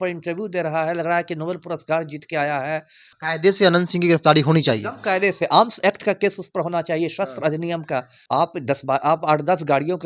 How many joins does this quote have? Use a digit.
2